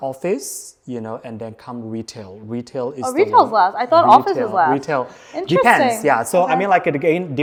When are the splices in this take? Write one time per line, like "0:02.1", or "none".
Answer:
none